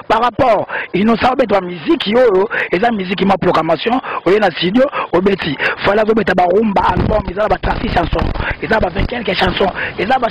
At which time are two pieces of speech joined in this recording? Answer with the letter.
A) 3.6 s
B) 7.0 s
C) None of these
C